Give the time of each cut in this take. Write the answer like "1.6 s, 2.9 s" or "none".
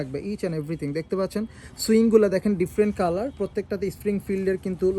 none